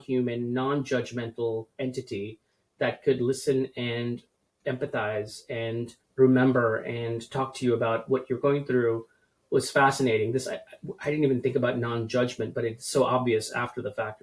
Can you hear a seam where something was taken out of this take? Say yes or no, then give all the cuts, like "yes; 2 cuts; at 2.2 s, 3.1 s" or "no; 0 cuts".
yes; 1 cut; at 6.0 s